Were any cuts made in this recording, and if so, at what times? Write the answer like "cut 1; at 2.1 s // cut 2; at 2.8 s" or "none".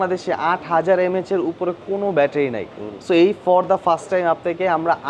none